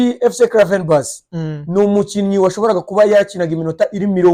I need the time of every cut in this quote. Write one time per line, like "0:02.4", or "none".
none